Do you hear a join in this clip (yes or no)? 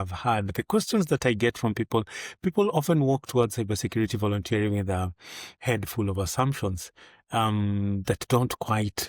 no